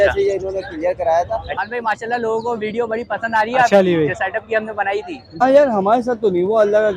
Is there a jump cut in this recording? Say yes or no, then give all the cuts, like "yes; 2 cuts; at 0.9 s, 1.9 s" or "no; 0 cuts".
yes; 2 cuts; at 1.6 s, 5.4 s